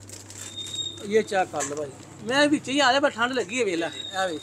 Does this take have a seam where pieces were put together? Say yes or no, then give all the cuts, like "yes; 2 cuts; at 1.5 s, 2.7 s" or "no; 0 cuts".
no; 0 cuts